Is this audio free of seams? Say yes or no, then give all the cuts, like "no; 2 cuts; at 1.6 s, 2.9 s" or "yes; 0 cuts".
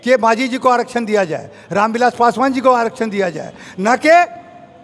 yes; 0 cuts